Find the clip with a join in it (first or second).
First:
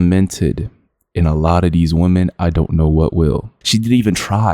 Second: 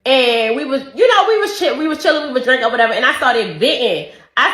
first